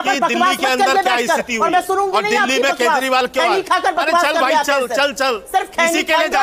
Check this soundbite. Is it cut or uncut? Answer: uncut